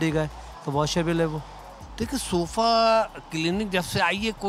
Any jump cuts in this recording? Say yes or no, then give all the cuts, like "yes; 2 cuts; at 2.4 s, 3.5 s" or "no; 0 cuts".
no; 0 cuts